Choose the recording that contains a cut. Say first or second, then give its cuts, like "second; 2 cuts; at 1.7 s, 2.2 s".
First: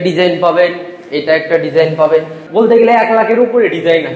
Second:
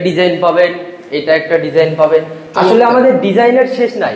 first; 1 cut; at 2.4 s